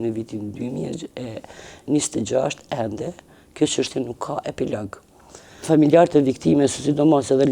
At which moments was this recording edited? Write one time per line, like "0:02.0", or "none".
0:05.6